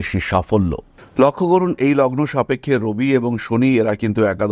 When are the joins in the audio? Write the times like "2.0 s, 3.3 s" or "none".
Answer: 0.9 s

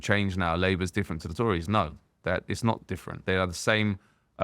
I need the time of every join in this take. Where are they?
3.1 s

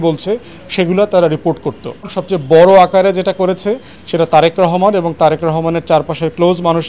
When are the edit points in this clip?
2.2 s

